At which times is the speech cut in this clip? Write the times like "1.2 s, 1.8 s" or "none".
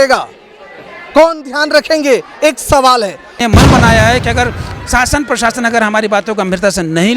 3.4 s